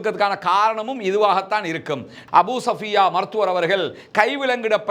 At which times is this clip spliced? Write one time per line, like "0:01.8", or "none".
0:02.1